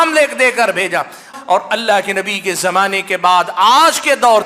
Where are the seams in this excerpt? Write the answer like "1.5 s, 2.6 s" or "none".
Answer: 1.3 s